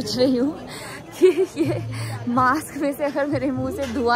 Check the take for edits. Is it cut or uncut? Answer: uncut